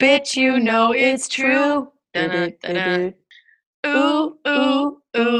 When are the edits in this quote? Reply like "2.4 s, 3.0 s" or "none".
1.0 s